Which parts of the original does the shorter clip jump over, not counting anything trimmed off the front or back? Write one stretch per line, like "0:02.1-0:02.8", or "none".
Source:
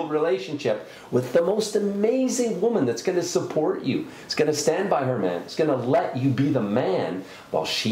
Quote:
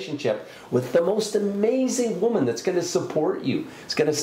none